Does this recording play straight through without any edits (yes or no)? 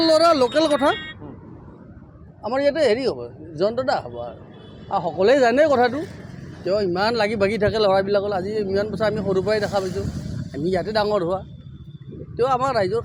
yes